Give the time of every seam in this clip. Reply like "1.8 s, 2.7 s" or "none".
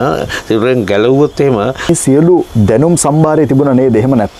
1.9 s